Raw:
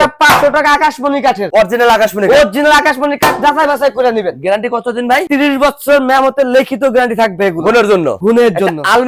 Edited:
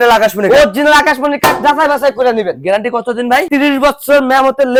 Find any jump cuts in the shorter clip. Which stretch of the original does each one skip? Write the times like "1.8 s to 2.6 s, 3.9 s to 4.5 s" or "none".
none